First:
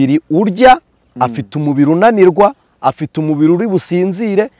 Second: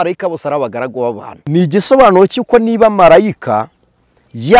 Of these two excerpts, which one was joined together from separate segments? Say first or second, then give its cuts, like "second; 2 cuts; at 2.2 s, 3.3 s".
second; 1 cut; at 1.3 s